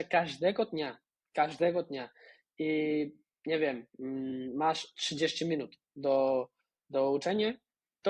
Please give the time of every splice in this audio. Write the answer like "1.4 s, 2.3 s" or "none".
none

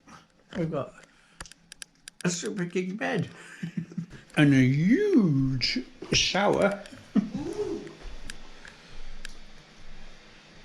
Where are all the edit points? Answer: 4.2 s

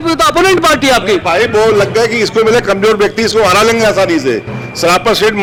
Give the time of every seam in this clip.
none

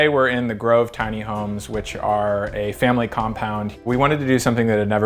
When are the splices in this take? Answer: 3.7 s

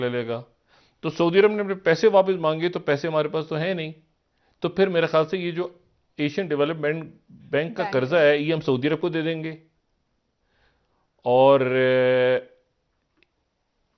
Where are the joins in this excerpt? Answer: none

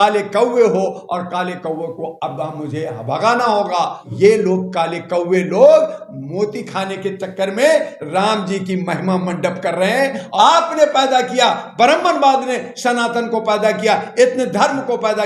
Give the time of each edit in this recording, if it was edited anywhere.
4.1 s, 10.3 s

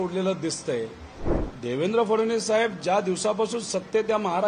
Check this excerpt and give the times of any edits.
1.4 s

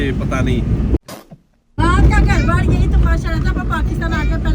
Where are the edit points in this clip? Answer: none

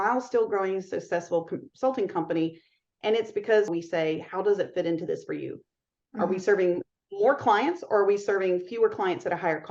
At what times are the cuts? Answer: 3.7 s

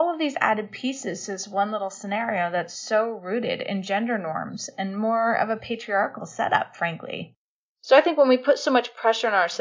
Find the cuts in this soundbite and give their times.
7.4 s

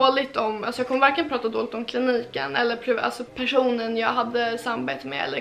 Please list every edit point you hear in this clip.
none

